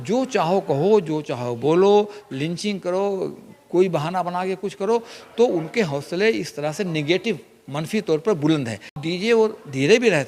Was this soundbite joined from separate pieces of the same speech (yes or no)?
yes